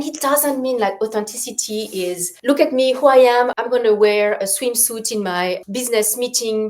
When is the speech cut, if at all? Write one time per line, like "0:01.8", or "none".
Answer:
0:02.3
0:03.5
0:05.6